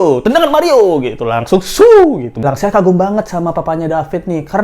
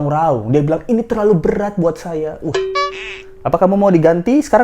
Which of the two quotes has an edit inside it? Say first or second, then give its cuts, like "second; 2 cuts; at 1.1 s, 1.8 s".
first; 1 cut; at 2.4 s